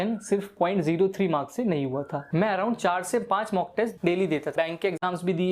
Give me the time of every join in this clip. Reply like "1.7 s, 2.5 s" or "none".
2.3 s, 4.5 s

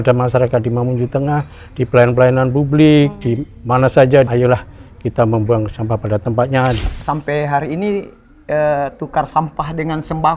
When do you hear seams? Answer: 4.3 s, 6.8 s

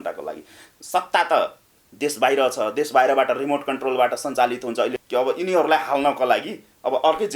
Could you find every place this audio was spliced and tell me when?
5.0 s

